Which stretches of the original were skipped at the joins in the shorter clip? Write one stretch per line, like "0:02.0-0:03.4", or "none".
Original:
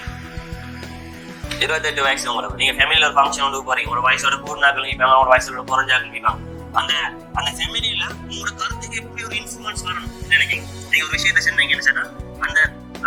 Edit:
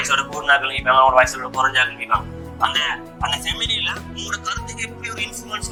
none